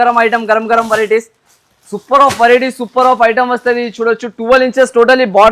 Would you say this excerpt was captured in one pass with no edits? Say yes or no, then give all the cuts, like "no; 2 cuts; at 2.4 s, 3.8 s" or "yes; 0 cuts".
yes; 0 cuts